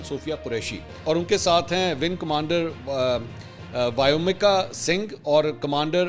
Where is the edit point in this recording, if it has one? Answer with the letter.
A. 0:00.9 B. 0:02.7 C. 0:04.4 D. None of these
A